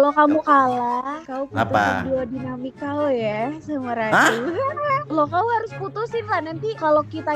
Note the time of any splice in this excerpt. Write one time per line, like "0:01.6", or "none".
0:04.7